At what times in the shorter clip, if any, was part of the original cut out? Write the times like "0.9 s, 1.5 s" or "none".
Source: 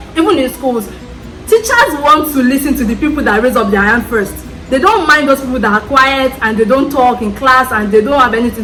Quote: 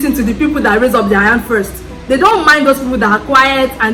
none